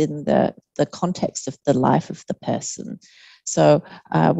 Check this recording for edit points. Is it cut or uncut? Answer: uncut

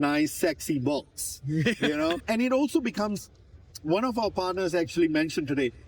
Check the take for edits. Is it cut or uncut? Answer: cut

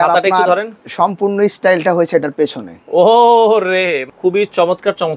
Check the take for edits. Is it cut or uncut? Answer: cut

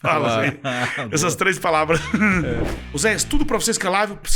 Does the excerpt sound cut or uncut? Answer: cut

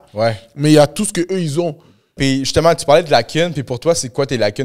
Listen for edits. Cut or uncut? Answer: cut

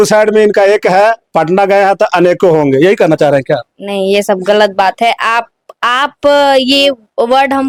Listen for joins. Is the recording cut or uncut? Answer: uncut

